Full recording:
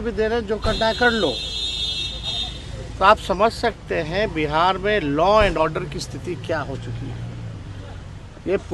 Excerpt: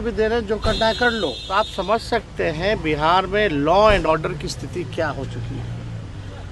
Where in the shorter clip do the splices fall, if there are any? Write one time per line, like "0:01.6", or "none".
0:01.4